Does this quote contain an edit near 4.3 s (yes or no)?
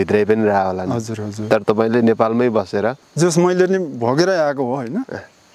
no